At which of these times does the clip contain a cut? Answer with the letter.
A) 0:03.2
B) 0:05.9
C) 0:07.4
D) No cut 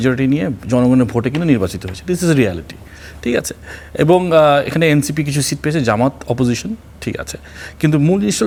D